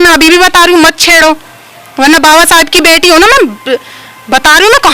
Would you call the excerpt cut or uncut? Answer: uncut